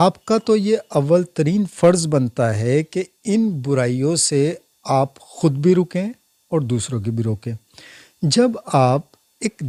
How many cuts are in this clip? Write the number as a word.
zero